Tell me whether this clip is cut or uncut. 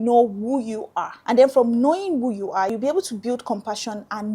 cut